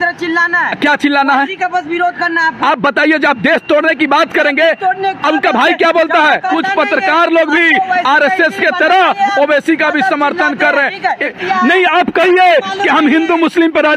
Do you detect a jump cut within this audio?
yes; 2 cuts; at 6.5 s, 11.3 s

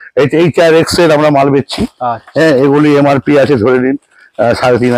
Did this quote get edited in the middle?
no; 0 cuts

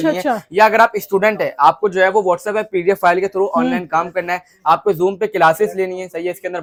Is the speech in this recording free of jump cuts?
yes; 0 cuts

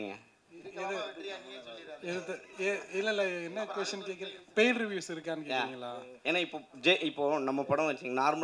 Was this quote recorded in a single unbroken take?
yes; 0 cuts

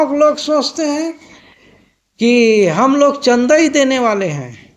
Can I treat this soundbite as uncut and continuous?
yes; 0 cuts

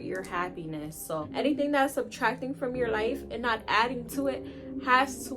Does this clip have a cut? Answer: yes; 1 cut; at 1.2 s

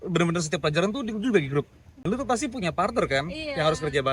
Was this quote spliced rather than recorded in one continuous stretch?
yes; 1 cut; at 2.1 s

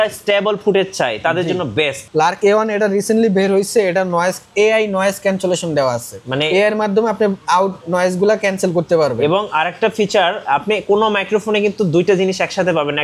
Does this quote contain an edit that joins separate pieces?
yes; 1 cut; at 2.0 s

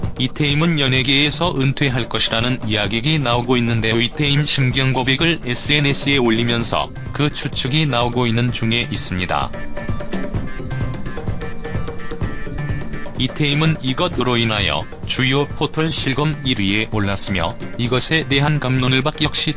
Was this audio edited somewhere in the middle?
no; 0 cuts

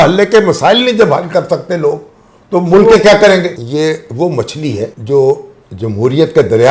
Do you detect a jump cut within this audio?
yes; 2 cuts; at 3.5 s, 5.0 s

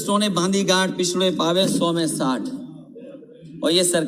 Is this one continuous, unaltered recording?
yes; 0 cuts

